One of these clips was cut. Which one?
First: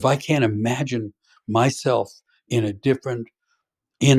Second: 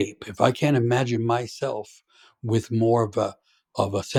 first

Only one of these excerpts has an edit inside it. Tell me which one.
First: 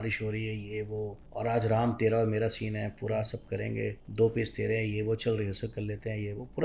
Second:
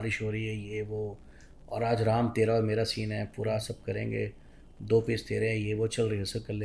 first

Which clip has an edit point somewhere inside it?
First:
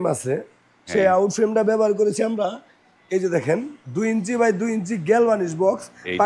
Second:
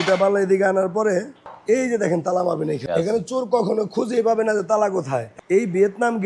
second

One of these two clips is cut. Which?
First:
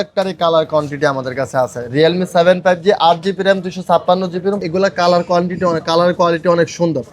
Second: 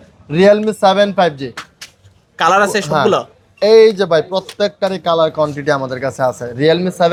first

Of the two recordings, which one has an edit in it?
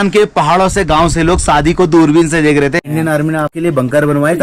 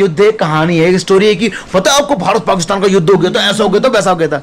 first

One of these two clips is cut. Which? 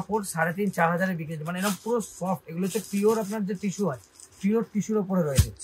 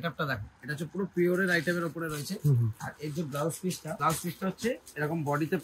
second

